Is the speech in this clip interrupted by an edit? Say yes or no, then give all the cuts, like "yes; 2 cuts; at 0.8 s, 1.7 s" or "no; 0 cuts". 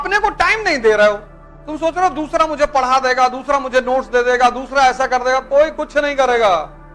no; 0 cuts